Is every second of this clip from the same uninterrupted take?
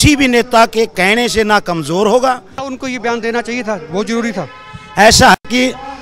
no; 1 cut; at 2.7 s

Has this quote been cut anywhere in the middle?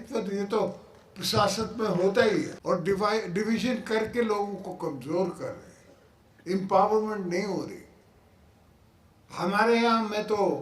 yes; 1 cut; at 2.5 s

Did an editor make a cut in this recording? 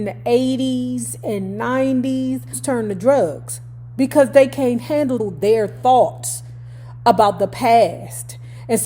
yes; 1 cut; at 2.6 s

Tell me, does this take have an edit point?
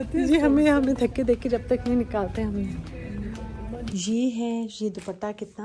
yes; 1 cut; at 3.9 s

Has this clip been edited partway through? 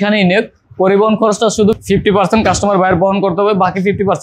yes; 1 cut; at 1.8 s

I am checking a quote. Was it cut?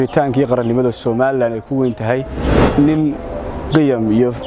yes; 1 cut; at 2.5 s

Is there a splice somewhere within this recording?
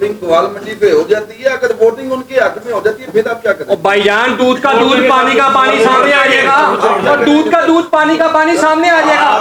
no; 0 cuts

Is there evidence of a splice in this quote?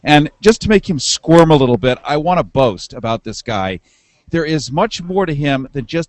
no; 0 cuts

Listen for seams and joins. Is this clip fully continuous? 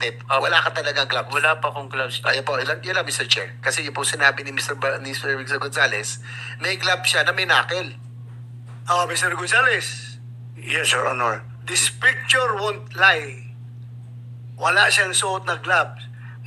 yes; 0 cuts

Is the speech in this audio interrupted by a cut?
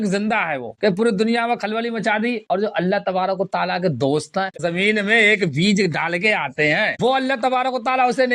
yes; 2 cuts; at 4.5 s, 6.9 s

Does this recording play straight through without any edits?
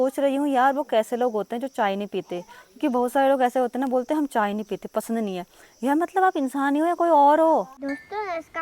yes; 0 cuts

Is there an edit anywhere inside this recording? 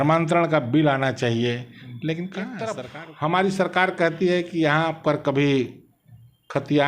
yes; 1 cut; at 2.8 s

